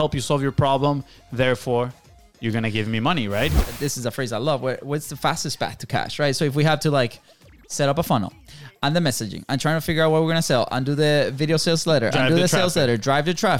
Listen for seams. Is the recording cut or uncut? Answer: cut